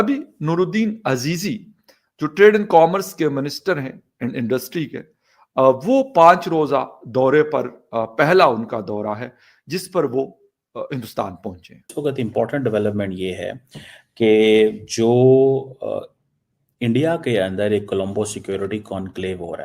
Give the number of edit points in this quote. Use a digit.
1